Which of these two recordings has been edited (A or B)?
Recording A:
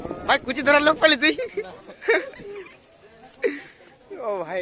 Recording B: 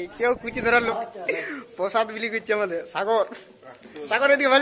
B